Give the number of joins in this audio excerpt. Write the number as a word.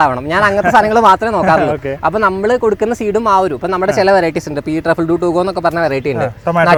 zero